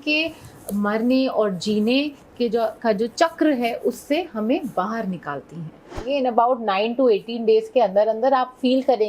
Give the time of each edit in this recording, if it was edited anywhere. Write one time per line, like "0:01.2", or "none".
0:06.0